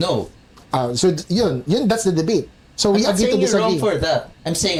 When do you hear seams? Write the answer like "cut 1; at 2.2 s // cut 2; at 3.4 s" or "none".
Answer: none